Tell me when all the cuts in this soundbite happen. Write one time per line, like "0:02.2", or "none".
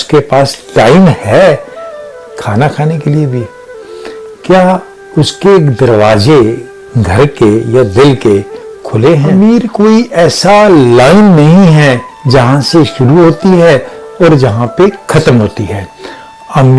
0:09.3